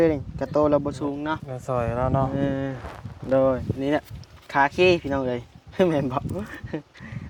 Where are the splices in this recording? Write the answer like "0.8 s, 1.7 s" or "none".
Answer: none